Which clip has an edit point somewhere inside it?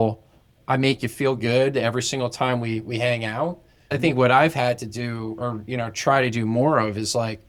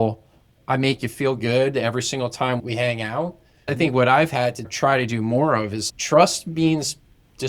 second; 3 cuts; at 2.6 s, 4.7 s, 5.8 s

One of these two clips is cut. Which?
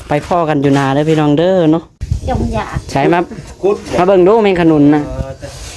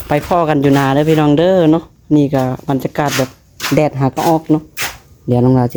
first; 1 cut; at 1.9 s

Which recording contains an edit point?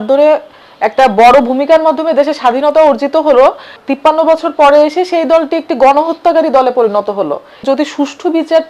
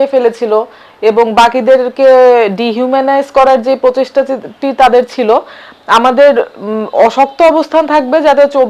first; 2 cuts; at 3.8 s, 7.6 s

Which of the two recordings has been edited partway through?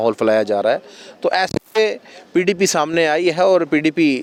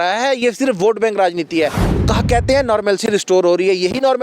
second; 1 cut; at 1.9 s

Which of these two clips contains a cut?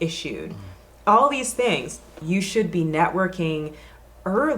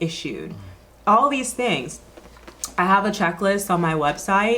first; 1 cut; at 2.2 s

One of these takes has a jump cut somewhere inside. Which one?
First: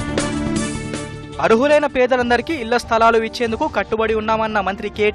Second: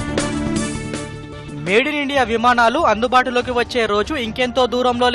first; 1 cut; at 1.1 s

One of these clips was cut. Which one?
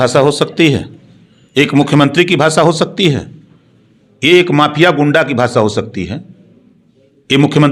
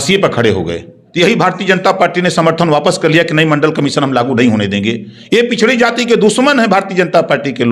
second; 1 cut; at 1.0 s

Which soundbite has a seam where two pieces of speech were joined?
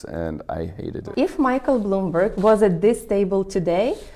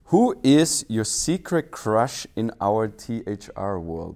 first; 2 cuts; at 1.1 s, 2.3 s

